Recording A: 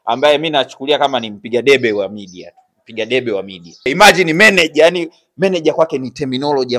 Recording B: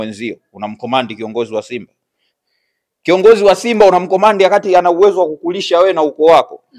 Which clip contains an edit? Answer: A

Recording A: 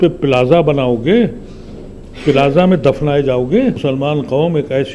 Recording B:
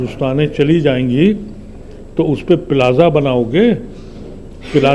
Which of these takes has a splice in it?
A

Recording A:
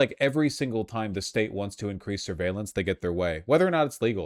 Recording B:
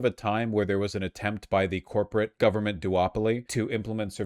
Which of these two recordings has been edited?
B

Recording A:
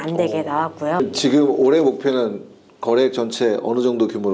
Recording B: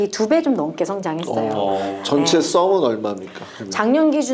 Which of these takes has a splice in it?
A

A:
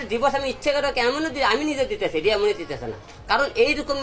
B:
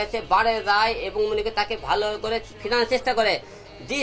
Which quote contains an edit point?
B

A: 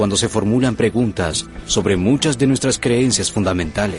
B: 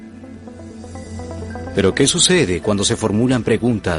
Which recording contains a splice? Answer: B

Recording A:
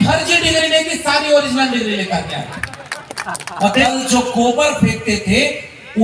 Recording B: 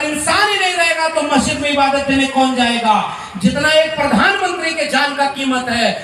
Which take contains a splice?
A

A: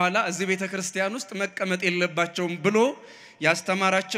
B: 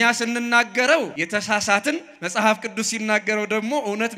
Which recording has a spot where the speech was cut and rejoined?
B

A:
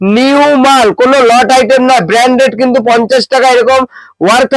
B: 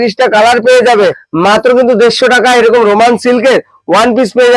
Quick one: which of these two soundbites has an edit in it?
B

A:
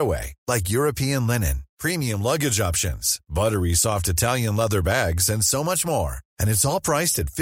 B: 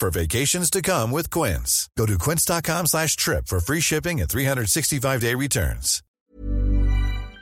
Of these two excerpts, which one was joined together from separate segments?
B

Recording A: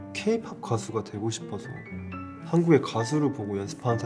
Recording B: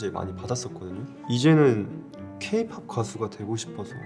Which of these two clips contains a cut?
B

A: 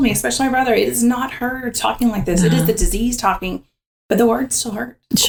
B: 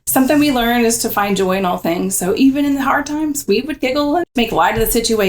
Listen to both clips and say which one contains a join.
B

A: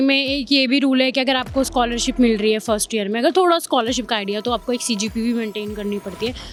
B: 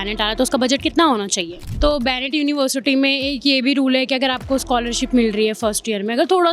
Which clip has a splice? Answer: B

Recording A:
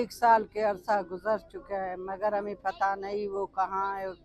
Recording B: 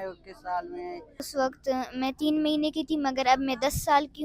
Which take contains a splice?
B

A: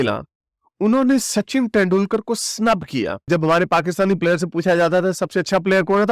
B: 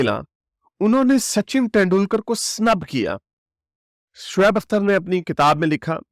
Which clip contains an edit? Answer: A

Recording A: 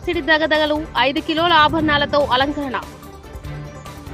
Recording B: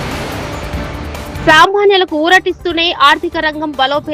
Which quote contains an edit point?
B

